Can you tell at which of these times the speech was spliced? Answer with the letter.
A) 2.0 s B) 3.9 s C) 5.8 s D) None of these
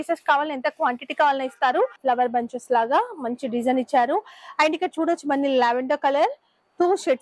A